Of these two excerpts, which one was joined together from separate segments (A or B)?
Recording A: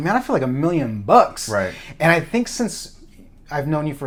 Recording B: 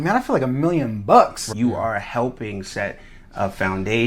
B